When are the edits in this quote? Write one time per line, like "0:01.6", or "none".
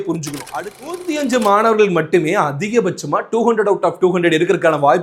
0:01.0

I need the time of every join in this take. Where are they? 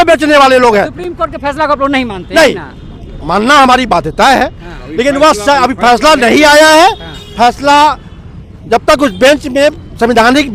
none

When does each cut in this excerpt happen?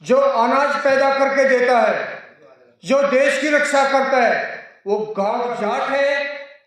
0:05.4

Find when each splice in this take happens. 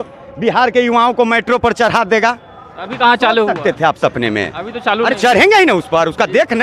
none

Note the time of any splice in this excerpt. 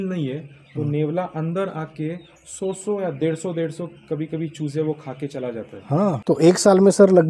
0:06.2

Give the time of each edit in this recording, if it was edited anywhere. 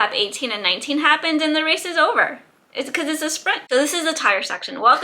0:03.6

